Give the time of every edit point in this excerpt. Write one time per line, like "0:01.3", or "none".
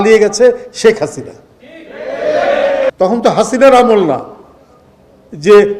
0:02.9